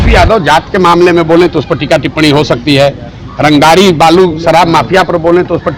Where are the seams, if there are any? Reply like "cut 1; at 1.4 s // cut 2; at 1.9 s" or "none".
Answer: none